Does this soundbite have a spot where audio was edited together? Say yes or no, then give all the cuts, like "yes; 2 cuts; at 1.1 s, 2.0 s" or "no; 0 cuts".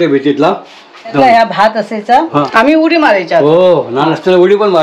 yes; 2 cuts; at 1.1 s, 2.5 s